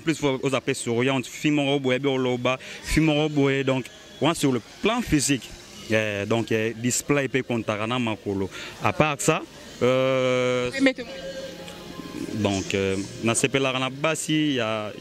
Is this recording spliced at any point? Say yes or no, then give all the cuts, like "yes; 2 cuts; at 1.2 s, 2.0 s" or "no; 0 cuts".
no; 0 cuts